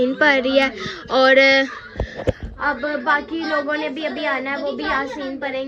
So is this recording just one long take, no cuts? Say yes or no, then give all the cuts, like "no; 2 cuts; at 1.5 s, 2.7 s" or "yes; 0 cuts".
yes; 0 cuts